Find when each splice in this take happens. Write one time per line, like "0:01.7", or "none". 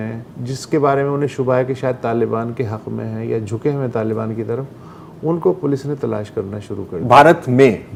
none